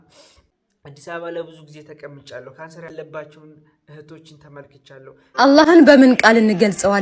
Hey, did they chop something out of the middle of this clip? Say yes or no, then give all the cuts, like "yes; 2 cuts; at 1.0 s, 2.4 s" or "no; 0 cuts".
yes; 3 cuts; at 1.1 s, 2.9 s, 5.2 s